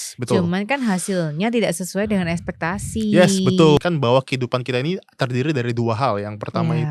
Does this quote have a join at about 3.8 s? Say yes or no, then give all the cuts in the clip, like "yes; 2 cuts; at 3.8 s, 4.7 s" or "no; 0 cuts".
yes; 1 cut; at 3.8 s